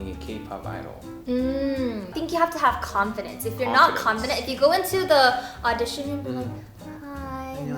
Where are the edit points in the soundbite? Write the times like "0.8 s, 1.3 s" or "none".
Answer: 2.1 s